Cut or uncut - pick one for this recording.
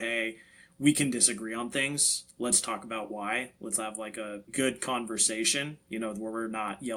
uncut